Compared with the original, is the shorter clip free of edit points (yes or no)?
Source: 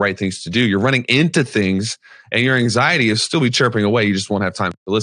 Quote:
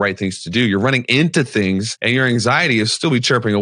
no